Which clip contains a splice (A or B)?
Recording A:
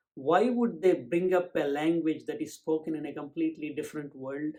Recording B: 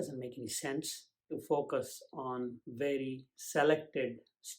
B